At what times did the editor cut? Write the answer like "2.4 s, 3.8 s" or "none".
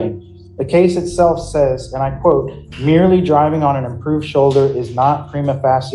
none

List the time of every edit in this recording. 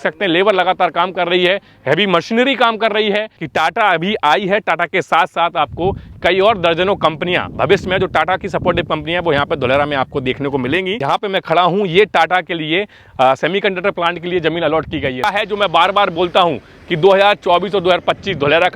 3.3 s, 10.9 s, 15.2 s

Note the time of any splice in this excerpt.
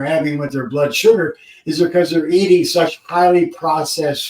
none

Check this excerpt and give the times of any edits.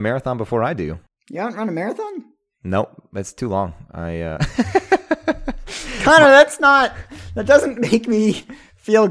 1.1 s

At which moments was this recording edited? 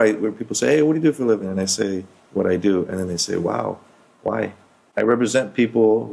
4.8 s

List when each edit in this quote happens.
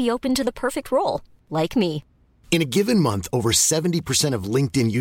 none

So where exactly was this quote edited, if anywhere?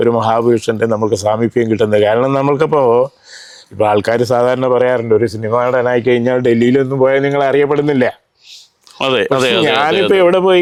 none

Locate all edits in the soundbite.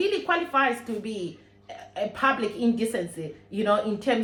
none

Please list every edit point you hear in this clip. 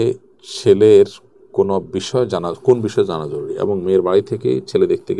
none

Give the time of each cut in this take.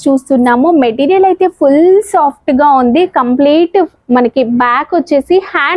none

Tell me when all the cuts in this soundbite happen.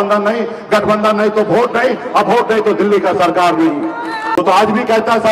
4.4 s

